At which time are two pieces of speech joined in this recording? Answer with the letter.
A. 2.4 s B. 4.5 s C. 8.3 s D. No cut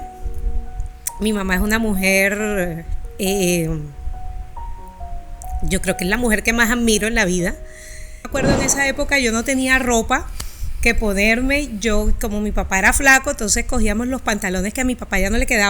C